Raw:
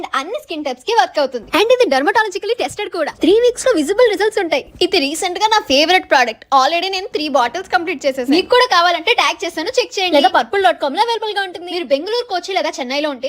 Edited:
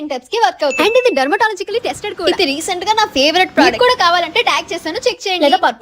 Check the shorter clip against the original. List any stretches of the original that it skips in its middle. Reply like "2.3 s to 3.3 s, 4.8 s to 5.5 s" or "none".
1.3 s to 1.5 s, 3.0 s to 4.8 s, 6.2 s to 8.4 s

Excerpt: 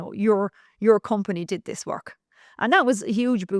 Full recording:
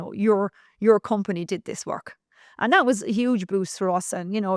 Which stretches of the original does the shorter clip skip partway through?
none

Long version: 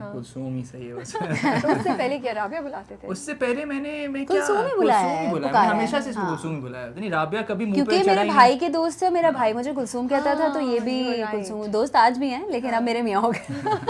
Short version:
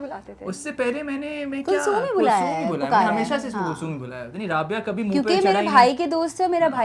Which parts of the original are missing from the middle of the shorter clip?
none

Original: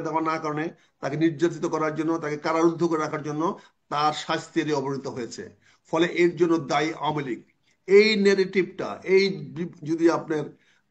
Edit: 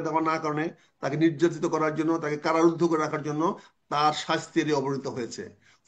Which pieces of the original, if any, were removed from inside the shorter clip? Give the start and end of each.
none

